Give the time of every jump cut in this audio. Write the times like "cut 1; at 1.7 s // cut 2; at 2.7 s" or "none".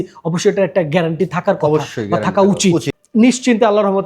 cut 1; at 3.0 s